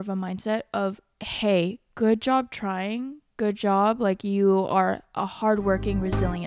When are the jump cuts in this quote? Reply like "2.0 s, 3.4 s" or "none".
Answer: none